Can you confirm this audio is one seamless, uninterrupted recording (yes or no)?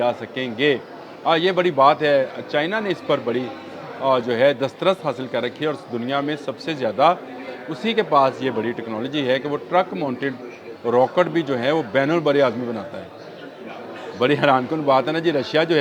yes